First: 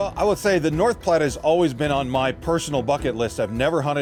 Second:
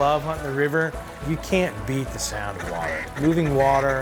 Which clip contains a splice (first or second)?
second